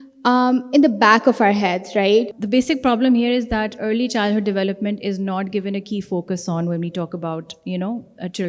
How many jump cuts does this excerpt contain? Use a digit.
1